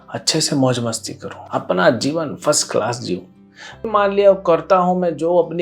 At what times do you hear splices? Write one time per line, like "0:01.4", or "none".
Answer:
0:03.8

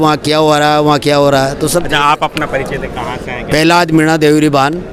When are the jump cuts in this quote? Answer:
none

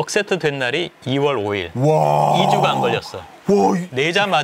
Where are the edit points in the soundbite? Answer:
none

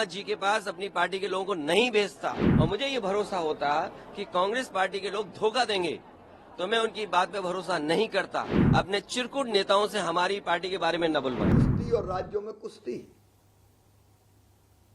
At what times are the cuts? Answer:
0:02.4
0:08.6
0:11.6

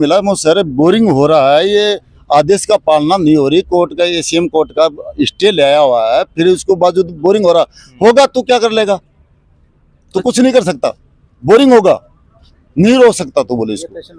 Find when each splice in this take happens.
none

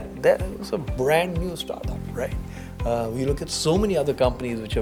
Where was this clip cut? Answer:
none

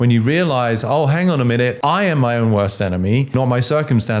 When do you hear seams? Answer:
0:01.8
0:03.3

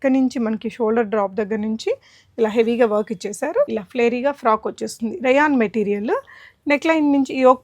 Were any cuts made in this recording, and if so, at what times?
0:03.7

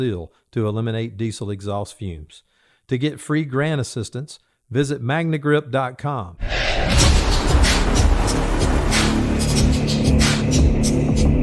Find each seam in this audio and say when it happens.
0:06.4

